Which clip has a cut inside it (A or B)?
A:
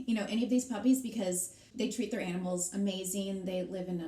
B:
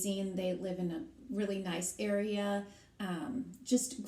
A